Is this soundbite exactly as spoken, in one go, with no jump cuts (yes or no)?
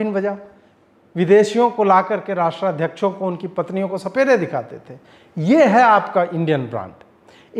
yes